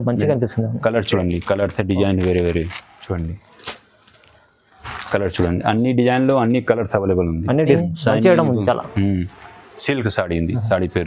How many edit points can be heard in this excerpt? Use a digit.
1